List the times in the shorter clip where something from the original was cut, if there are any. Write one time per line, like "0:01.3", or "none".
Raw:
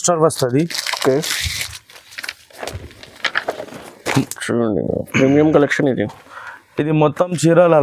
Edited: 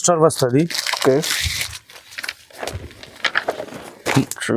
none